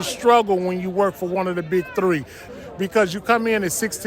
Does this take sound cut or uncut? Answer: cut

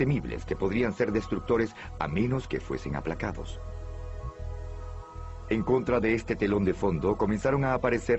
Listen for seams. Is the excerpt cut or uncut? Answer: uncut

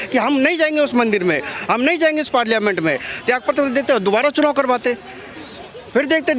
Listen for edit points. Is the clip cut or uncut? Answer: uncut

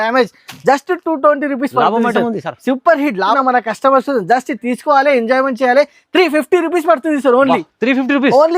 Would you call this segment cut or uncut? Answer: cut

